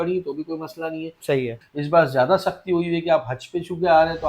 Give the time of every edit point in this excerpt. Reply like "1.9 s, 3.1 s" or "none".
1.6 s